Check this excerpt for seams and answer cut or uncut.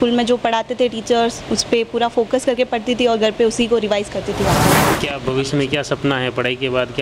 cut